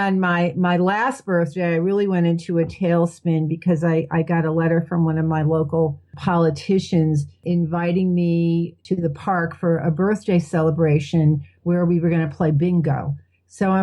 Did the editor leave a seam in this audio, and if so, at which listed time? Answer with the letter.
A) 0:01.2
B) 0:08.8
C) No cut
B